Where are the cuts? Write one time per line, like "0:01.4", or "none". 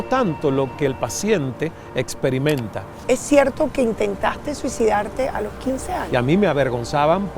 0:03.0
0:06.0

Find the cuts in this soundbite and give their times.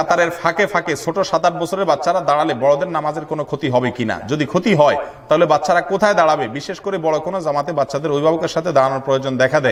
none

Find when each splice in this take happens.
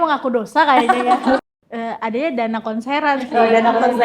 0:01.4

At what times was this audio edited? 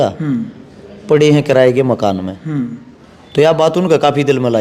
none

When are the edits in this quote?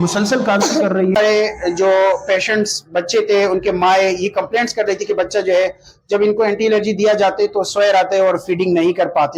0:01.2

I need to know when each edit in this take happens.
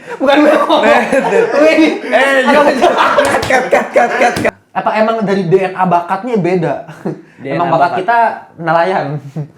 0:04.5

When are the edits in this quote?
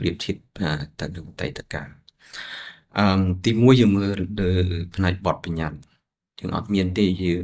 none

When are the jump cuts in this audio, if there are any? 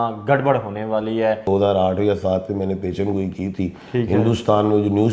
0:01.5

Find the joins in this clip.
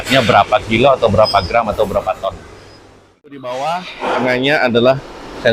0:03.4

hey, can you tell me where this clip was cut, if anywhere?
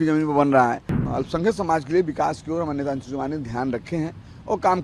0:01.0

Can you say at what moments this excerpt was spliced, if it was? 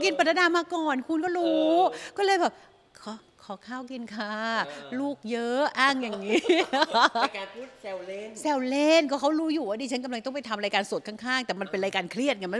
none

